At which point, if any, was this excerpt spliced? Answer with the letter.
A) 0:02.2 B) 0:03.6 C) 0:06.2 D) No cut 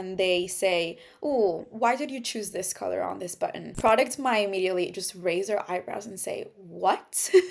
B